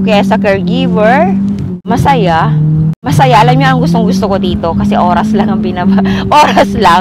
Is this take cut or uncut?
cut